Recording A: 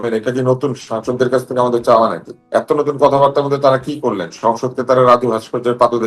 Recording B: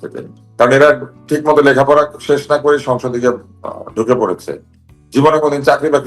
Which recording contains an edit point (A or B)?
A